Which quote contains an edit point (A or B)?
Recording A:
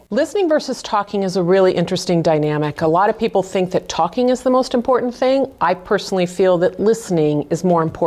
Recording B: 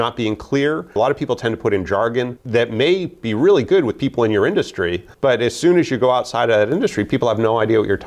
B